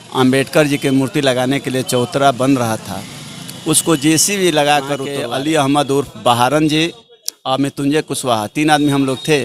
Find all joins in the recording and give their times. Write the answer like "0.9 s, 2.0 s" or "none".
5.1 s